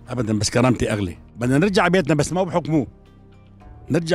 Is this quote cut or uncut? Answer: cut